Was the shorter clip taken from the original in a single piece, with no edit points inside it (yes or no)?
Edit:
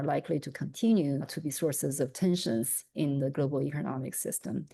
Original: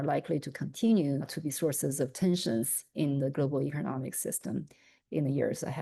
yes